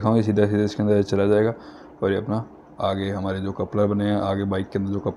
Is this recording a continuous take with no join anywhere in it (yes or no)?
yes